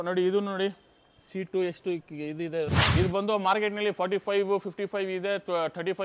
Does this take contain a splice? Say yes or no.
yes